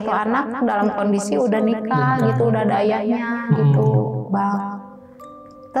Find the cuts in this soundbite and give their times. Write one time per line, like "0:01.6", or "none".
none